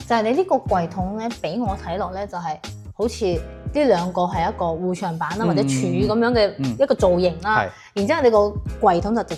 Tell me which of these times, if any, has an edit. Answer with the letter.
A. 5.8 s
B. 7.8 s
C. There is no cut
C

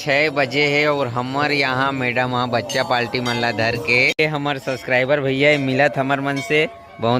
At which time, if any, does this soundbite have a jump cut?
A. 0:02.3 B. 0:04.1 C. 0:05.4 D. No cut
B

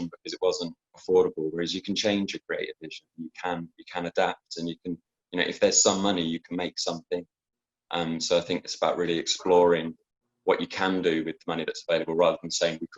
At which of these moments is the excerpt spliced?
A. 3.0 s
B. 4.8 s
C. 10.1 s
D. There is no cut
D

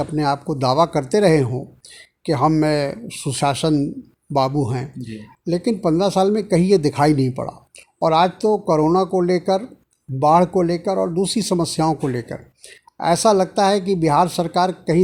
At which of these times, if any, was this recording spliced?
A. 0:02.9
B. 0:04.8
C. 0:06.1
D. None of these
D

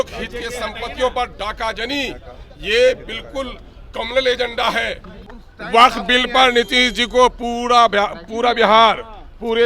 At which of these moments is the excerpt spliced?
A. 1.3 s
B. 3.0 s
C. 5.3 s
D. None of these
C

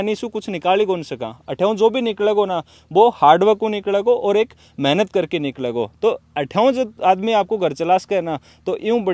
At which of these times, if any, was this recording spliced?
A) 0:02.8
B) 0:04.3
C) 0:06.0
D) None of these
D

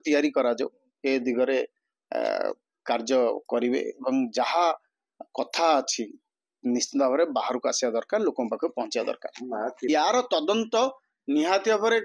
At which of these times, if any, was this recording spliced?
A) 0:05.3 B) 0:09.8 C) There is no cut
B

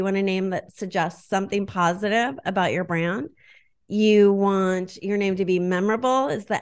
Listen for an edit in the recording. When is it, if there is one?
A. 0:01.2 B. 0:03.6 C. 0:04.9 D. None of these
D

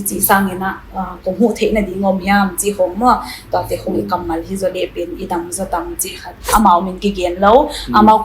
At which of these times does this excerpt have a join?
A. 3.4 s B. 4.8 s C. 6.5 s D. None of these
C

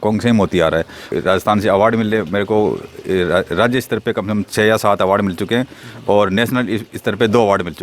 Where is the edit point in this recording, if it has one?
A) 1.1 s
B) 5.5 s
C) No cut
A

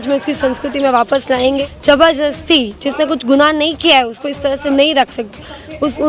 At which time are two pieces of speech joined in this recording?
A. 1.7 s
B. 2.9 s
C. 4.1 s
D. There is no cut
A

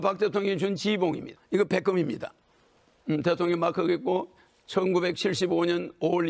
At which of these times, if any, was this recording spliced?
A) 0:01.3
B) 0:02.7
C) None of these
A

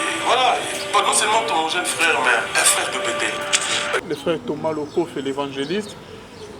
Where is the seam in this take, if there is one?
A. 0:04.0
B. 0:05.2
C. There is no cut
A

